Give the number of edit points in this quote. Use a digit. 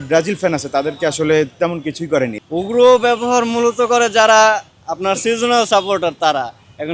1